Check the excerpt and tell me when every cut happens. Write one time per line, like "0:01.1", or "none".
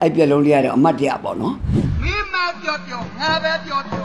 0:01.6